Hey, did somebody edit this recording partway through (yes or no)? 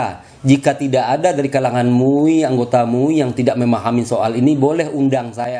no